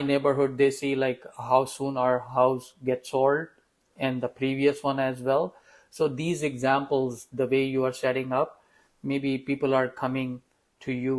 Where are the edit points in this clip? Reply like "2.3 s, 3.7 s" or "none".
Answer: none